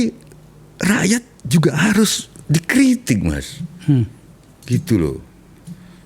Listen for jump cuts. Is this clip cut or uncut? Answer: uncut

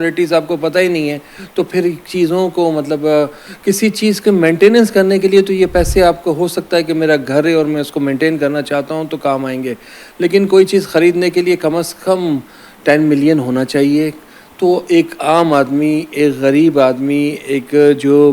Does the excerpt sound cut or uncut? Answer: uncut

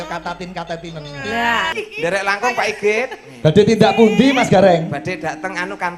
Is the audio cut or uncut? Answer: cut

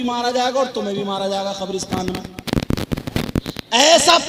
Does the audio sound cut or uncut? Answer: uncut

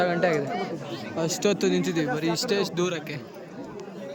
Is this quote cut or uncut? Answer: uncut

